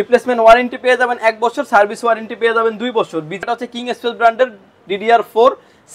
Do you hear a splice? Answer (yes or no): yes